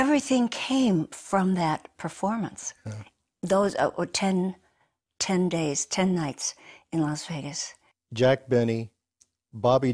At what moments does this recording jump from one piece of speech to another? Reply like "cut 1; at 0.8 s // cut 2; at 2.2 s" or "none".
cut 1; at 8.5 s